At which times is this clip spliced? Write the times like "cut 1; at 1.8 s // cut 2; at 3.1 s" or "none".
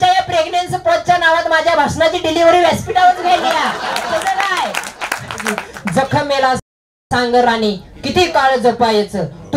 cut 1; at 5.7 s